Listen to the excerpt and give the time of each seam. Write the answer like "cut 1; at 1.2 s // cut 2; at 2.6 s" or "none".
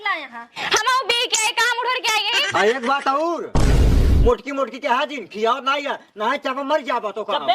cut 1; at 2.4 s